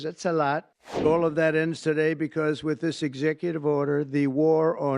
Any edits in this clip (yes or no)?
yes